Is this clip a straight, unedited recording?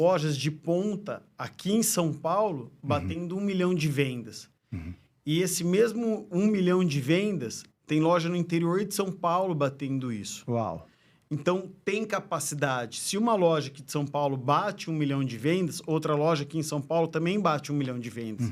yes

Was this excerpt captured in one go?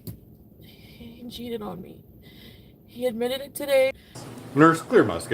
no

